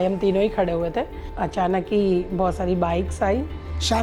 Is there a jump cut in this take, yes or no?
no